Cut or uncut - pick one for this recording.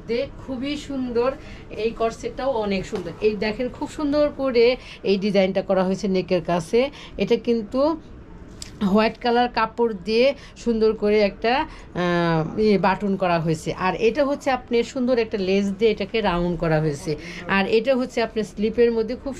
cut